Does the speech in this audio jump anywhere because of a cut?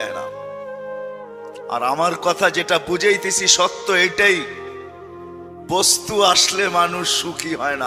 no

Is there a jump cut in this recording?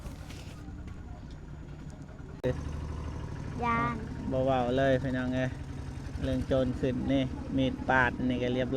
yes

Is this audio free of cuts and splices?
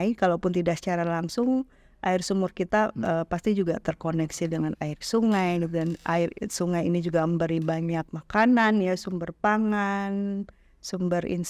no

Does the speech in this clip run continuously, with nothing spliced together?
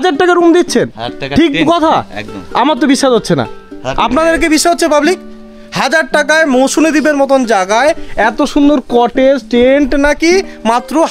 yes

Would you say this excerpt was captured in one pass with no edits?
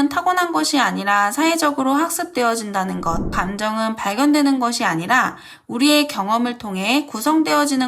no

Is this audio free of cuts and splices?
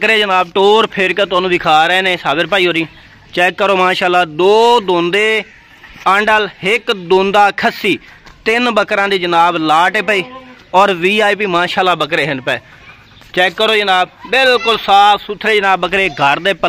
yes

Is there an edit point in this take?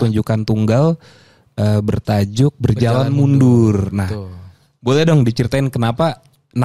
no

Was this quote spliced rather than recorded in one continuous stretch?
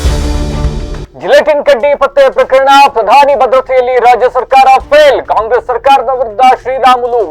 yes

